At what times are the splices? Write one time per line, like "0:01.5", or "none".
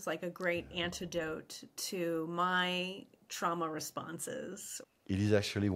0:04.7